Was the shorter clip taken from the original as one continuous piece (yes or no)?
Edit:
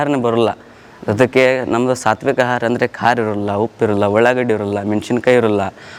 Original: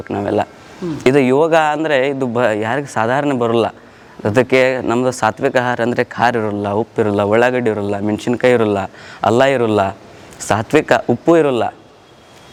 yes